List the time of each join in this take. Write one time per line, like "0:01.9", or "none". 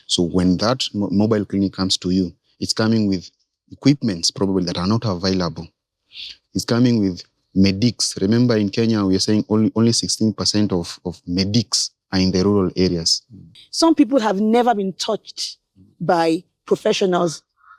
0:13.6